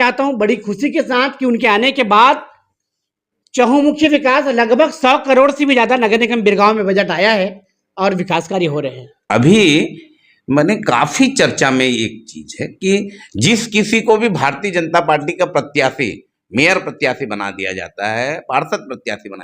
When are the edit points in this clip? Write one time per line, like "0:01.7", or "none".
0:09.1